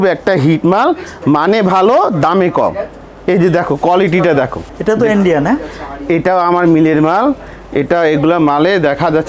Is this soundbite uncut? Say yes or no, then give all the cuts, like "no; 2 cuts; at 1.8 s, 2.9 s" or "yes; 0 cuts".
no; 1 cut; at 4.7 s